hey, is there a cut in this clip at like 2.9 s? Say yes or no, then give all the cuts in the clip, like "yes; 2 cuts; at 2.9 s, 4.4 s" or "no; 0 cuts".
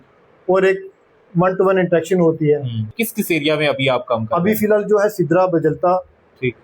yes; 1 cut; at 2.9 s